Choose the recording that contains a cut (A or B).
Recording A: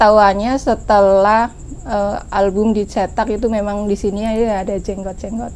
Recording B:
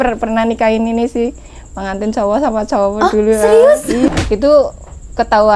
B